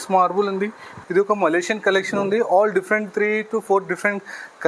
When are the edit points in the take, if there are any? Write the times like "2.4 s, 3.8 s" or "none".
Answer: 1.1 s